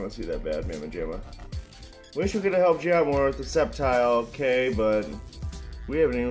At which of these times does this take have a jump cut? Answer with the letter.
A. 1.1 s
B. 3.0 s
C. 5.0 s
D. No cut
D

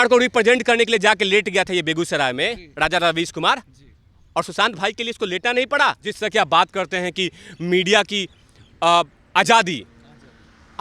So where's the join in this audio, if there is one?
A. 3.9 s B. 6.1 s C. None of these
B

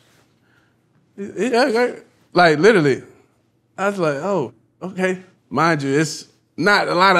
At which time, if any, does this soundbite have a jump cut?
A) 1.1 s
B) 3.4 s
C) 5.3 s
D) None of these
C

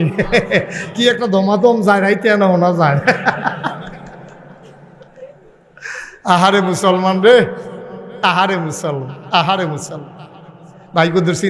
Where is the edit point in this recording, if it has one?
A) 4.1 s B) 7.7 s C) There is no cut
C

